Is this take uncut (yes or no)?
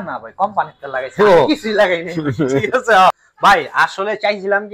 no